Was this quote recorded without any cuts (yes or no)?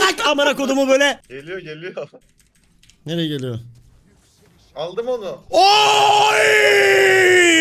no